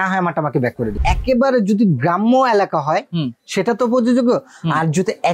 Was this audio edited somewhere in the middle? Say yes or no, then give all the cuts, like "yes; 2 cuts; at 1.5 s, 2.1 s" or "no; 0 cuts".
yes; 1 cut; at 1.0 s